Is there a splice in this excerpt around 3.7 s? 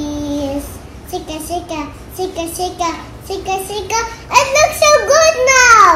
no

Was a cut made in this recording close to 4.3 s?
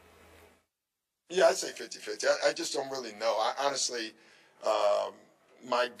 no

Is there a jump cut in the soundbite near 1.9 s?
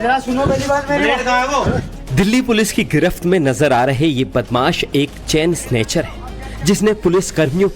yes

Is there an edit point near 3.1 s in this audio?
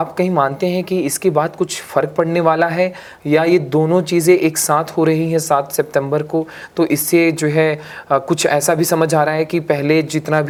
no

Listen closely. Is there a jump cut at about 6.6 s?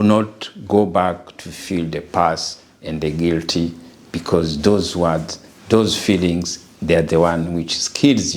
no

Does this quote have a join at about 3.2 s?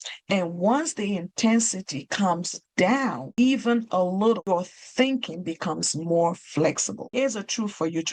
yes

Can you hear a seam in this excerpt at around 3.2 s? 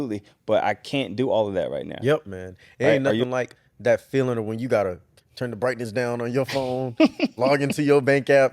yes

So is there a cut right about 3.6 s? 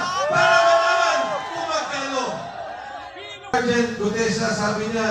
yes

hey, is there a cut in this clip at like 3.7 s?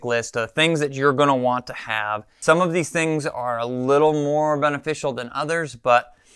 no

